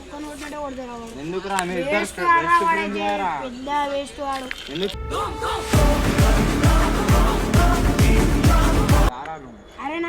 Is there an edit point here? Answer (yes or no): yes